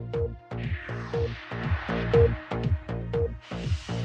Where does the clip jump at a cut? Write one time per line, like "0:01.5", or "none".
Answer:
none